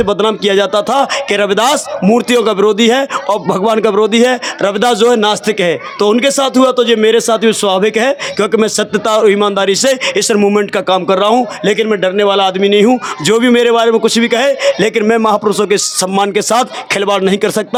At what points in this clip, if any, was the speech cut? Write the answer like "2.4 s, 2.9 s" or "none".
none